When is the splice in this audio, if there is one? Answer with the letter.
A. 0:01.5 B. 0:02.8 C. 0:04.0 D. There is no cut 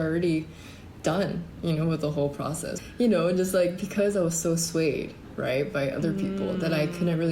B